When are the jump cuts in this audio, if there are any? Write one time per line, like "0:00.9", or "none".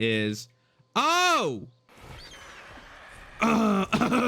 0:01.8